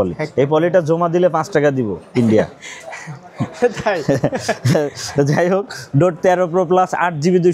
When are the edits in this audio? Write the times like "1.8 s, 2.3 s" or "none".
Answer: none